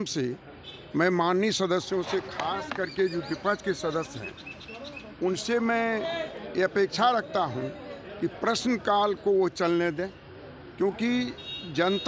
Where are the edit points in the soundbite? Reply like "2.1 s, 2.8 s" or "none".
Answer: none